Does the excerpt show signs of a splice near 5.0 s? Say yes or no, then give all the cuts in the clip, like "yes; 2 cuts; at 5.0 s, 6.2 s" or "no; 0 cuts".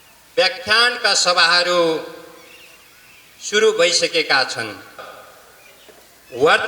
yes; 1 cut; at 5.0 s